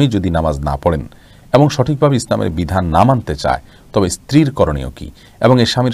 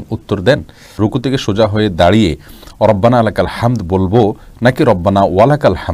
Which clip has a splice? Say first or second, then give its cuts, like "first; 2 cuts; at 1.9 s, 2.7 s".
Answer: second; 1 cut; at 1.0 s